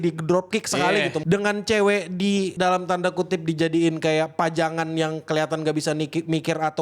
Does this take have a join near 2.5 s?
yes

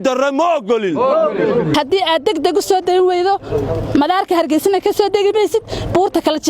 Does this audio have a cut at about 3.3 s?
no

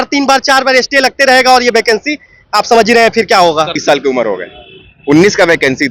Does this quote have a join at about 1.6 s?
no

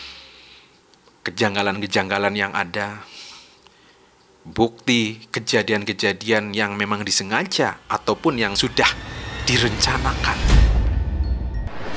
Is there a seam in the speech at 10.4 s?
yes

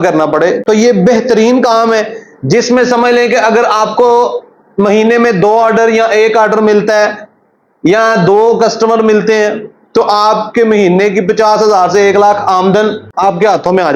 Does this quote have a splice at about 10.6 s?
no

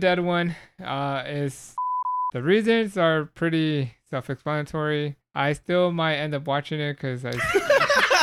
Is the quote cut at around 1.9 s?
yes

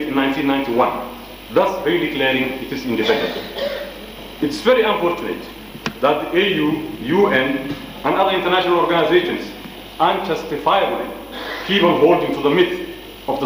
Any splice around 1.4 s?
no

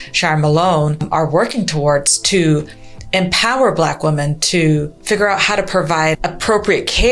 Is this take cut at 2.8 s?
no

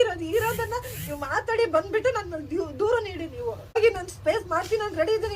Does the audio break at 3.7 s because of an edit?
yes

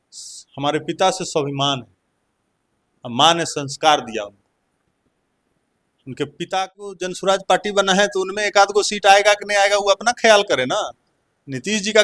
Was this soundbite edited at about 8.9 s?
no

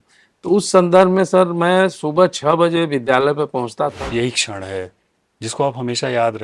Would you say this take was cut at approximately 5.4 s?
no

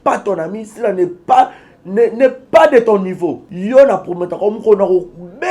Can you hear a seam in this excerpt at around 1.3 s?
no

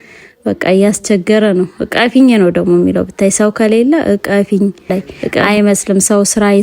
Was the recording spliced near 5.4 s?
yes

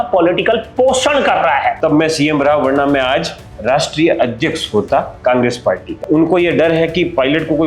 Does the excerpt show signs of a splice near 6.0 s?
yes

